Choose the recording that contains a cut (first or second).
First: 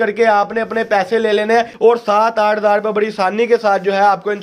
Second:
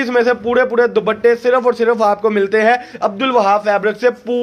first